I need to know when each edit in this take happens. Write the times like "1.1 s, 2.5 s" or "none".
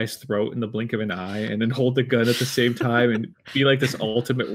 none